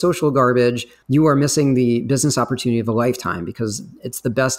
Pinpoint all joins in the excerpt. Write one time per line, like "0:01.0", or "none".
0:00.9